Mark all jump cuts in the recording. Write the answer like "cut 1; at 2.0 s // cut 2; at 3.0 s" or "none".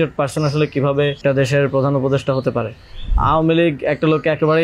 cut 1; at 1.2 s // cut 2; at 3.1 s